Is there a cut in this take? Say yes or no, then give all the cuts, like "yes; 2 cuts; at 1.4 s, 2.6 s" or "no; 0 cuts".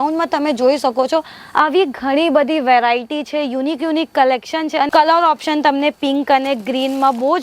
yes; 1 cut; at 4.9 s